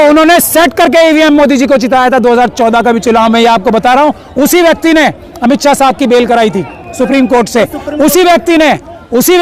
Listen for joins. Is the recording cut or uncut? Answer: uncut